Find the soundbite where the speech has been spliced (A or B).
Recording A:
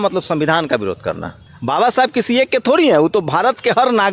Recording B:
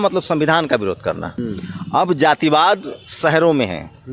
B